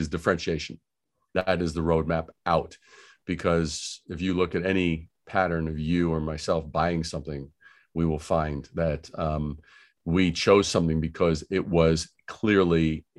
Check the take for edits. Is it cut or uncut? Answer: uncut